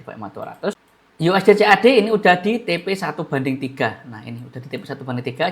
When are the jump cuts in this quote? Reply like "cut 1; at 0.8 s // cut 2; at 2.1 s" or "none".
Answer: cut 1; at 0.9 s